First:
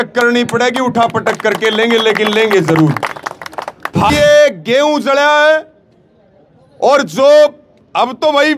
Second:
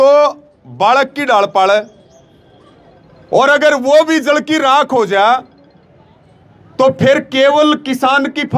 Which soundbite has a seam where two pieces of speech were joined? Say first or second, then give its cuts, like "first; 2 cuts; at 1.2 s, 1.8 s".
first; 1 cut; at 4.1 s